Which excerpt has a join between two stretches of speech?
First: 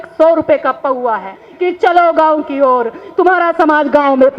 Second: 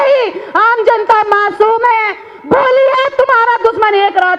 first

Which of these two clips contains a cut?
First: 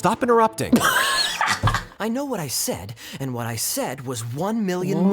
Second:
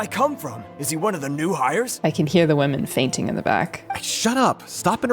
first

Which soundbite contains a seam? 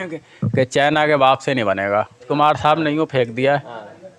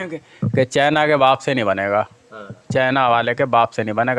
first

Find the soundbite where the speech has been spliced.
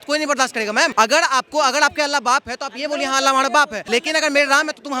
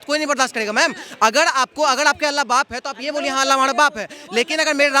first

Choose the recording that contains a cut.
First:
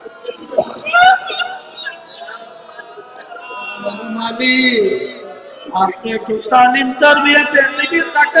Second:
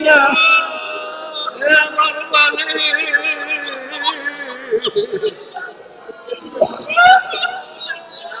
first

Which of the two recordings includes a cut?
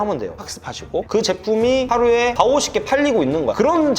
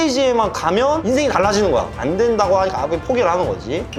first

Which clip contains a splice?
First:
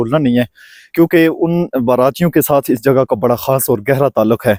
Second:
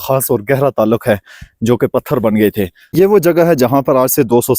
second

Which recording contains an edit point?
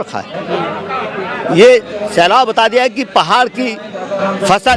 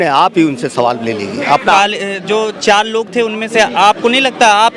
second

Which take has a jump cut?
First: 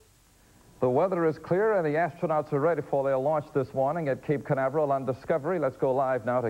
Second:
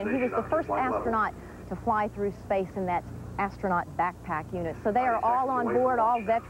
second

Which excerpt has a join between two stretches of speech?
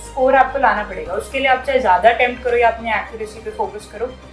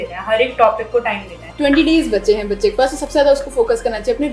second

